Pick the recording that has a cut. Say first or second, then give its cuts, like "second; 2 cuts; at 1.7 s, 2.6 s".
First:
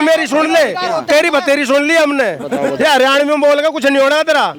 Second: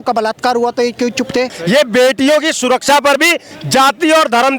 second; 1 cut; at 1.6 s